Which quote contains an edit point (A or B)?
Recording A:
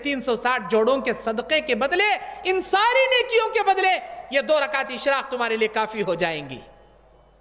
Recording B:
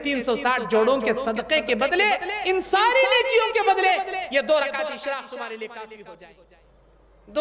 B